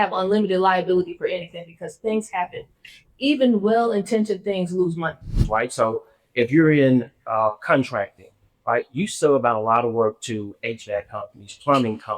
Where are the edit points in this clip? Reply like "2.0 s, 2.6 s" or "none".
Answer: 5.4 s